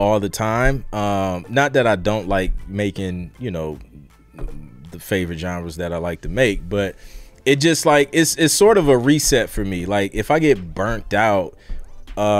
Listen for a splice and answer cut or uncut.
uncut